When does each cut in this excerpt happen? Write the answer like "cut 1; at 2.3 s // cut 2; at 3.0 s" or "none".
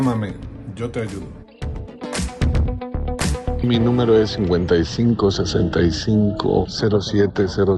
cut 1; at 3.6 s